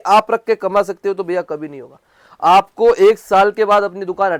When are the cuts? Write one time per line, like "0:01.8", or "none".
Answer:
none

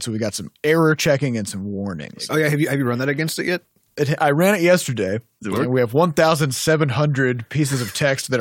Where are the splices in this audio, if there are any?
0:02.2

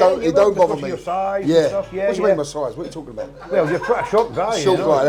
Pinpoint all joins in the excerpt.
none

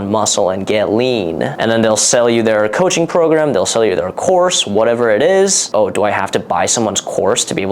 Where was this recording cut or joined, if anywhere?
0:05.7

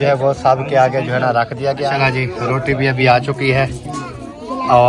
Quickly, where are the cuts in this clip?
0:01.9

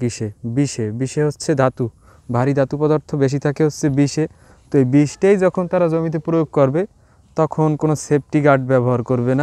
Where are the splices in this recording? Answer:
none

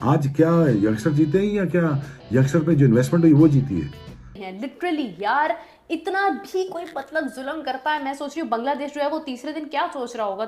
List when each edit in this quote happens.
0:04.3

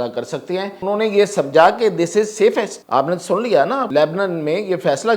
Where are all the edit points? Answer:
0:00.8
0:02.8
0:03.9

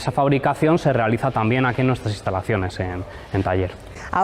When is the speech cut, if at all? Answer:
none

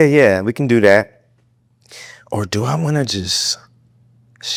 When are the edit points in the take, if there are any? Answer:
none

